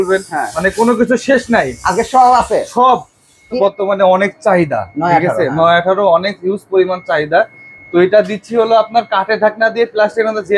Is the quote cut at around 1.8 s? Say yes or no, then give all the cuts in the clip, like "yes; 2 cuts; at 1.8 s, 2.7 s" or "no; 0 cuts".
no; 1 cut; at 3.6 s